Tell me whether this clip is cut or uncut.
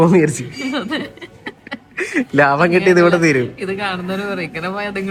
uncut